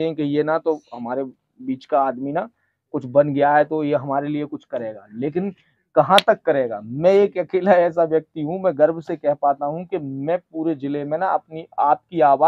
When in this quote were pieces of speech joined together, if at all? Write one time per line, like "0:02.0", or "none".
none